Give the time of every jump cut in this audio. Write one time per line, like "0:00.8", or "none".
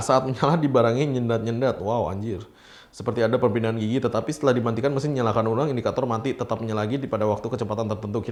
none